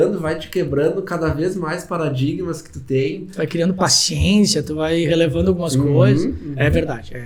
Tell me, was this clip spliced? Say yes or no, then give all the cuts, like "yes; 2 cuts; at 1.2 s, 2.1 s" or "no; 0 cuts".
no; 0 cuts